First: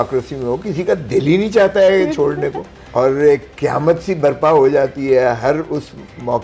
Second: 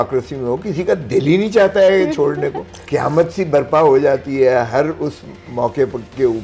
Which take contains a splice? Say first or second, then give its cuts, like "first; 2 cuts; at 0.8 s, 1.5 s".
second; 1 cut; at 2.8 s